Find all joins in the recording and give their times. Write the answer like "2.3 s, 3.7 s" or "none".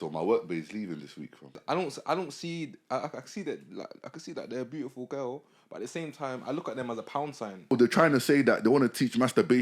1.6 s, 7.7 s